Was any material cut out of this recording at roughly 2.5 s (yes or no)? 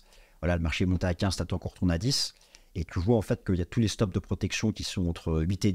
no